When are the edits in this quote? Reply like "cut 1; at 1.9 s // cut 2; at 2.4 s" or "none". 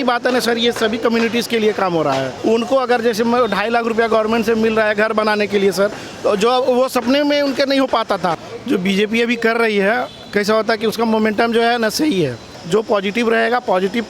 cut 1; at 2.3 s // cut 2; at 8.5 s // cut 3; at 12.5 s